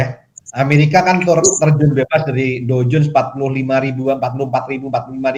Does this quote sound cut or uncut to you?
uncut